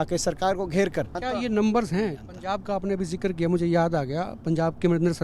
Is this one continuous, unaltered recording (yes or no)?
no